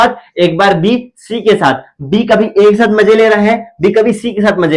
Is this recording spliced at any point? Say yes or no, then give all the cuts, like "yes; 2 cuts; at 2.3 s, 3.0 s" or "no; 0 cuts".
no; 0 cuts